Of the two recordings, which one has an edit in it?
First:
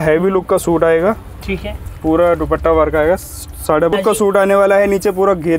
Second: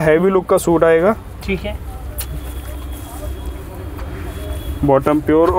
first; 2 cuts; at 1.8 s, 3.9 s

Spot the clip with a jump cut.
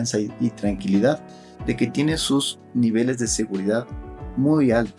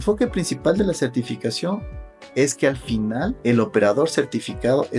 second; 1 cut; at 3.4 s

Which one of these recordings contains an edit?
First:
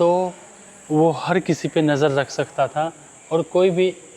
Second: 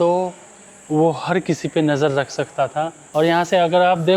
second; 1 cut; at 3.0 s

